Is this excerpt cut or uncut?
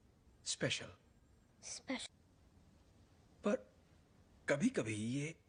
uncut